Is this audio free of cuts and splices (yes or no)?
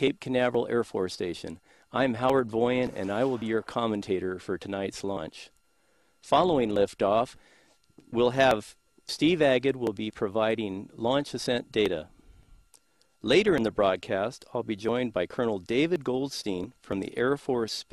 yes